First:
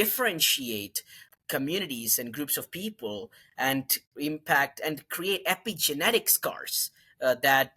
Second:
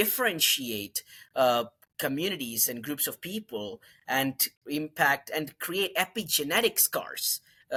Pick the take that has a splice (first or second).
first